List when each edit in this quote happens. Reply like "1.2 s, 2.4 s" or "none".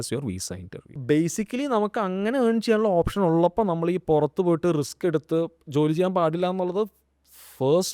1.0 s